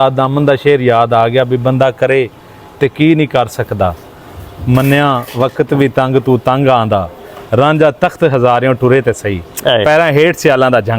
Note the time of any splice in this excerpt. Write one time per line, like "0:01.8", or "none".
none